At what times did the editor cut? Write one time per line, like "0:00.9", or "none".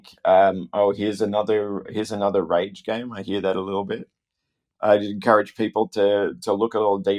none